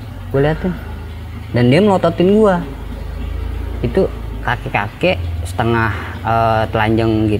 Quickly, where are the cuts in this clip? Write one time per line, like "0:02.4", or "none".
0:02.8